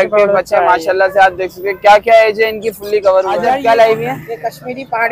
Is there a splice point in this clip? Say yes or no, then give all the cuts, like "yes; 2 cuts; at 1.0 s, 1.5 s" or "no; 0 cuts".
yes; 1 cut; at 3.5 s